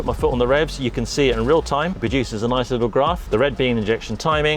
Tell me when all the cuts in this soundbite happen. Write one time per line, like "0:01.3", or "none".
0:02.0
0:03.2